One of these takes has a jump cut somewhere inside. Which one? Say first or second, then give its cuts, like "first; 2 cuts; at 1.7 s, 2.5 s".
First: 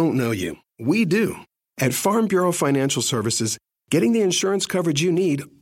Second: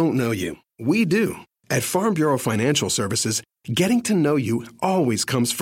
first; 1 cut; at 1.5 s